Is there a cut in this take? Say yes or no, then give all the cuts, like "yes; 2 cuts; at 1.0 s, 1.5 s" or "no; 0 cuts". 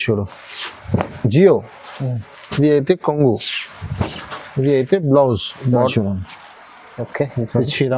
yes; 1 cut; at 5.9 s